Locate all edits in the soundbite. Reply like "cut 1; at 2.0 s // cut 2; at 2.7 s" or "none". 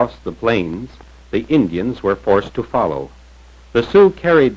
none